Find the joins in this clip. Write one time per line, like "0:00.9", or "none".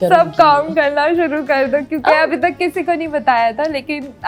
none